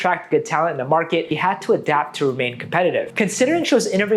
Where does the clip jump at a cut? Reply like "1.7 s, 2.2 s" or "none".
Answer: 1.3 s, 3.1 s